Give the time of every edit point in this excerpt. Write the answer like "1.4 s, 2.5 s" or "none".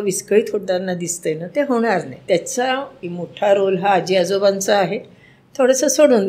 2.2 s, 3.0 s